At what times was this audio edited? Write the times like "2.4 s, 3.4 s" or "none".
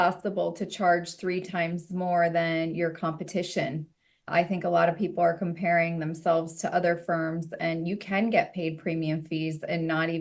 none